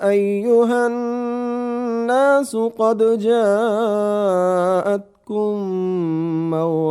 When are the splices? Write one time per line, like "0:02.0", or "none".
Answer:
none